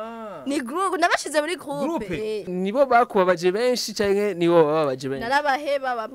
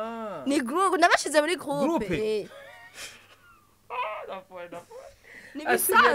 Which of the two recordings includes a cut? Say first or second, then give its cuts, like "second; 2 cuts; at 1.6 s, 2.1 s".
first; 1 cut; at 2.5 s